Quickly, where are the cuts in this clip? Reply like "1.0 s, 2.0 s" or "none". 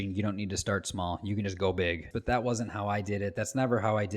2.1 s